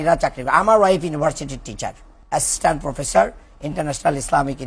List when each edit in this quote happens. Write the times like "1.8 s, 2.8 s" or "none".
2.1 s